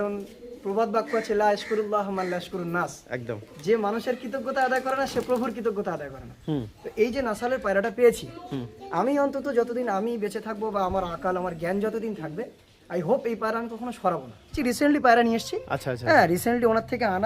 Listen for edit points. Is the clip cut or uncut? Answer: cut